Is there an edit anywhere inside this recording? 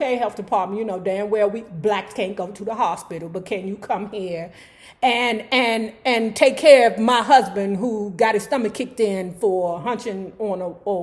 no; 0 cuts

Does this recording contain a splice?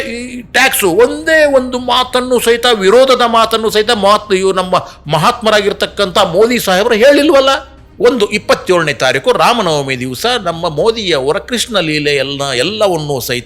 yes; 1 cut; at 7.8 s

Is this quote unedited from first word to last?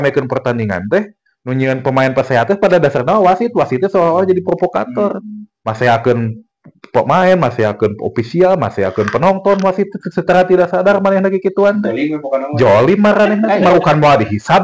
yes; 0 cuts

